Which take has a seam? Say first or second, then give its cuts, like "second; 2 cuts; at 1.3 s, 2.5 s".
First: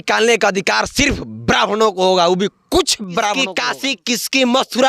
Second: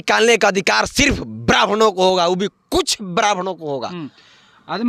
first; 1 cut; at 3.4 s